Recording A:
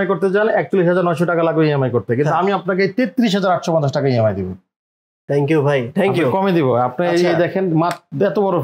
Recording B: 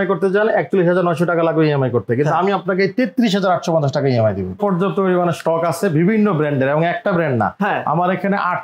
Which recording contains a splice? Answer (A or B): B